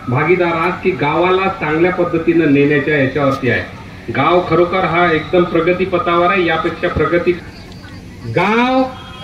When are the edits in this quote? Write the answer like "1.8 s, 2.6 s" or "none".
7.4 s